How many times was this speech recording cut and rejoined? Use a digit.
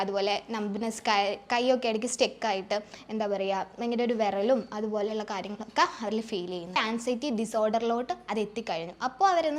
1